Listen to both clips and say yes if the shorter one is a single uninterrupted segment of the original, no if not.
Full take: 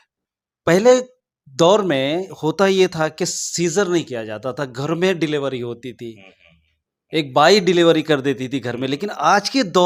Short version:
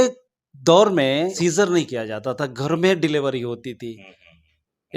no